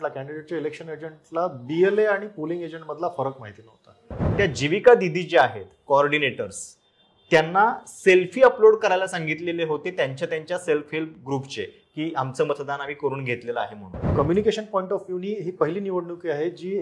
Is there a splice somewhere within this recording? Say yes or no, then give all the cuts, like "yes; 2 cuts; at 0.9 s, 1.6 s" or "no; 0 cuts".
yes; 2 cuts; at 4.2 s, 14.1 s